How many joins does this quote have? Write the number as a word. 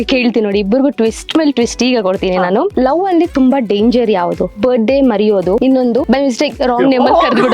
three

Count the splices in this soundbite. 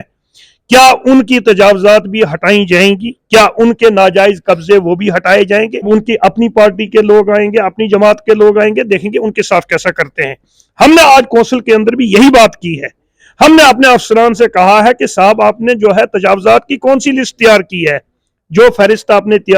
one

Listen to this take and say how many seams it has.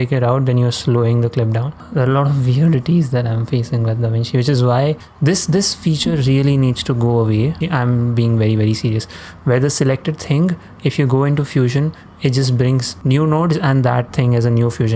four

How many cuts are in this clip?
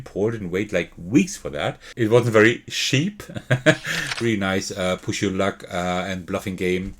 one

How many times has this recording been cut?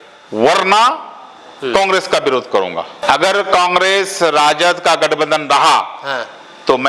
one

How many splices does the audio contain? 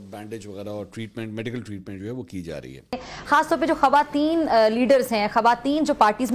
one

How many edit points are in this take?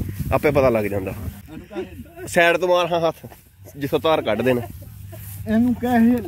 one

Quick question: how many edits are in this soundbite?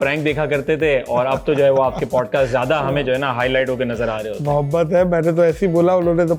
zero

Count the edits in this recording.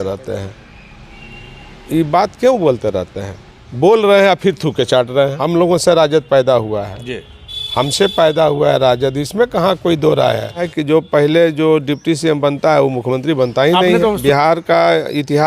three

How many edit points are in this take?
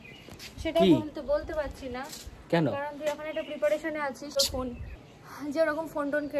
one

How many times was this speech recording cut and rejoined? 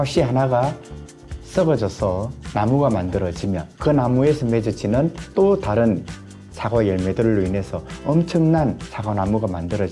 one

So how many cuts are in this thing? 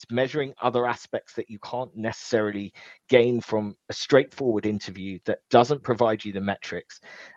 zero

